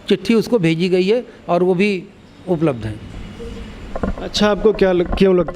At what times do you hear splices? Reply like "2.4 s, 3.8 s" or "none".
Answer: none